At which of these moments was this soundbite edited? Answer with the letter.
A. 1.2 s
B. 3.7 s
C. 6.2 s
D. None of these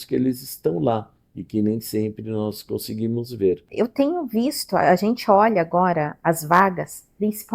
B